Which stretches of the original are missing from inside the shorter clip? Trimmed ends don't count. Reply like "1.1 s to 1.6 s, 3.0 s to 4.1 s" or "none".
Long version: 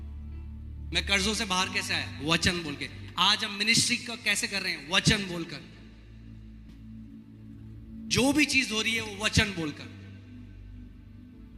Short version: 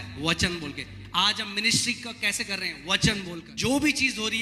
5.5 s to 8.0 s

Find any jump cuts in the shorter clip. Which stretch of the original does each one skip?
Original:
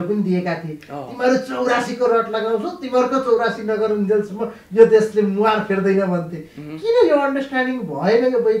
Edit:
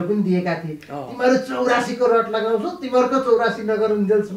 none

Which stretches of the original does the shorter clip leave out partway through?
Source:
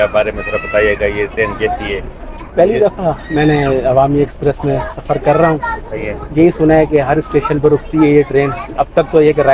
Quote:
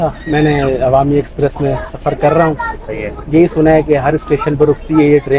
none

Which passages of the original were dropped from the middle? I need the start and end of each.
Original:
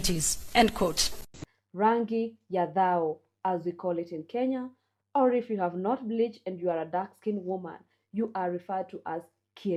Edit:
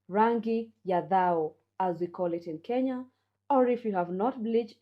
none

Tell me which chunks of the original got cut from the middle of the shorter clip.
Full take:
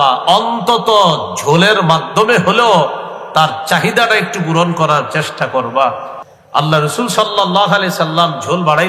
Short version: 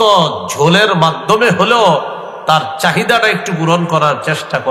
none

